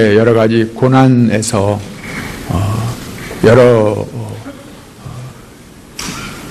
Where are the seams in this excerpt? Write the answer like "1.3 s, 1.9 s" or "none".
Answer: 1.1 s